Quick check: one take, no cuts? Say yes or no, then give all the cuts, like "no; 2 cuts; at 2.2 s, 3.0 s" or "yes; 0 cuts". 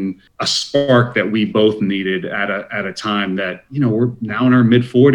yes; 0 cuts